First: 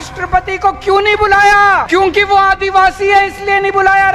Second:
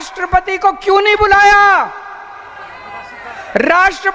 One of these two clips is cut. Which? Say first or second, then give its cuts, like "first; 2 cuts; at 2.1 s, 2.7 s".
first; 1 cut; at 1.8 s